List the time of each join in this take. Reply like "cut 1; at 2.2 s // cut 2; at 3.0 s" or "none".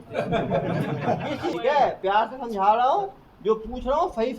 cut 1; at 1.6 s